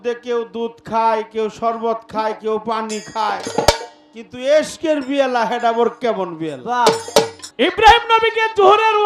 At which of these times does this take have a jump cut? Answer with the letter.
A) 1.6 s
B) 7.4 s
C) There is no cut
B